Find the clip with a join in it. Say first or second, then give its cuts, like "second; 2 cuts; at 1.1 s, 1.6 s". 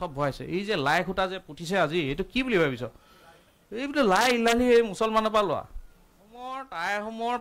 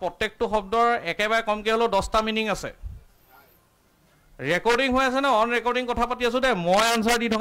first; 1 cut; at 6.5 s